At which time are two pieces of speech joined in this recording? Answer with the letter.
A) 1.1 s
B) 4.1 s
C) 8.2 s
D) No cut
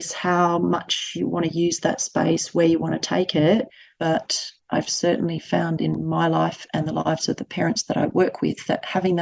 B